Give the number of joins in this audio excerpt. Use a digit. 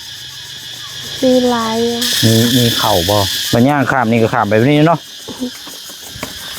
1